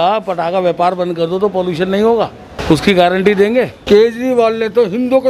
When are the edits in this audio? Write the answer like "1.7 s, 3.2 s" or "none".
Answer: 2.5 s, 3.8 s